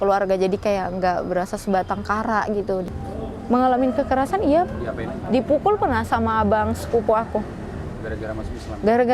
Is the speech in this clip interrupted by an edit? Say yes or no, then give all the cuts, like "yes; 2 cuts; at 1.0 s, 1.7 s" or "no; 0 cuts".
yes; 1 cut; at 2.9 s